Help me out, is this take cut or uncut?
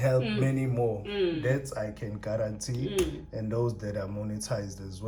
uncut